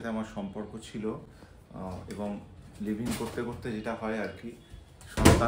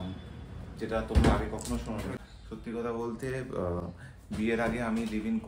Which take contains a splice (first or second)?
second